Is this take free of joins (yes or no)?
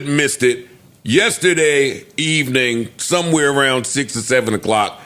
yes